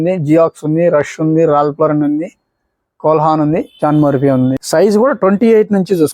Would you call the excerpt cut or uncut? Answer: cut